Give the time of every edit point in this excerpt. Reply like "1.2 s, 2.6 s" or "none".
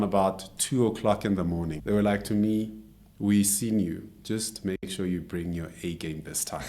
1.8 s